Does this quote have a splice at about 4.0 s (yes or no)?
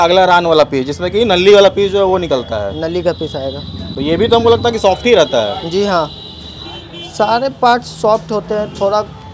no